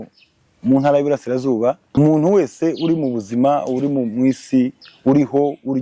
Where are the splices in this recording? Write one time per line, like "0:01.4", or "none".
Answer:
0:01.8